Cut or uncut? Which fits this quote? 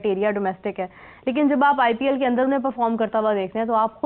uncut